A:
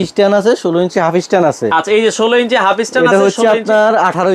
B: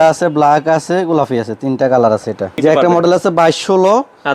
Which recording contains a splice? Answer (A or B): B